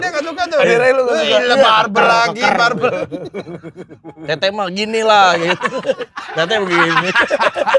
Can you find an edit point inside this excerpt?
no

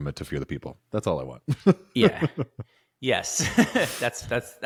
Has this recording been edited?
no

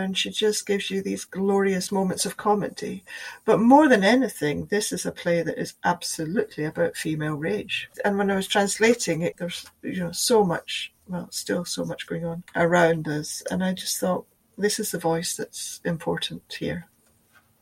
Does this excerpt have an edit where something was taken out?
yes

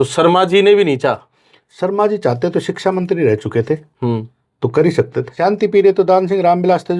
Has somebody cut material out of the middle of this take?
yes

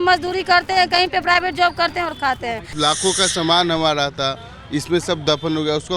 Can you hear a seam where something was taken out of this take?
yes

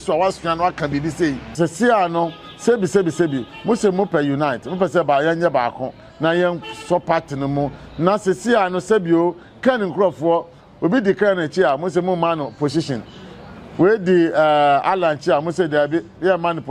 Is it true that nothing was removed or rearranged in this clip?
no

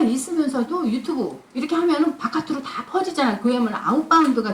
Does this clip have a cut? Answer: no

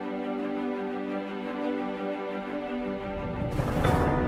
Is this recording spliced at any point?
no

